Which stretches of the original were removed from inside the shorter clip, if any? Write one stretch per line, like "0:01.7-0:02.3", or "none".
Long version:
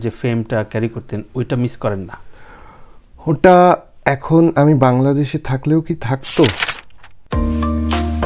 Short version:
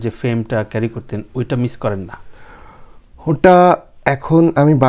none